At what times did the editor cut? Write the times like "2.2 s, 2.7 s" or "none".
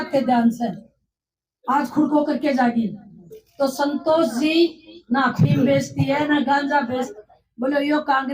7.1 s

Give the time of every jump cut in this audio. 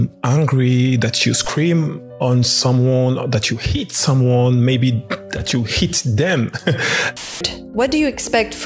7.4 s

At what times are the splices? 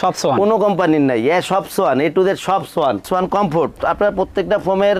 3.0 s

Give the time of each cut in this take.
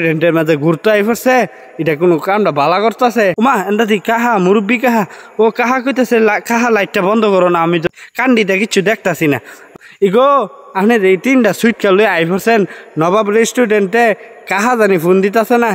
3.3 s, 7.9 s, 9.7 s

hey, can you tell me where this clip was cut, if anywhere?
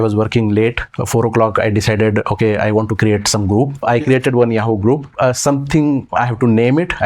0.9 s, 3.8 s, 5.1 s

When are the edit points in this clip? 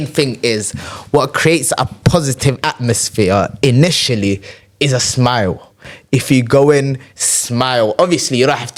none

